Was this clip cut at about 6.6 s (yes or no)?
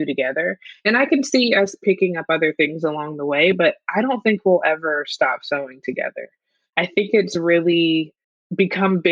yes